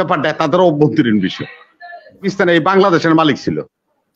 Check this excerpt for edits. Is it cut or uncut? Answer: cut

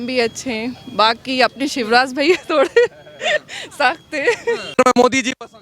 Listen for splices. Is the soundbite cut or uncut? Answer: cut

